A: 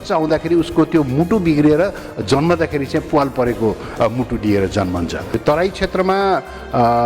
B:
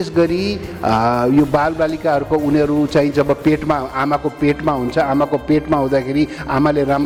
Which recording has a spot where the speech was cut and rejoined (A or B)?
A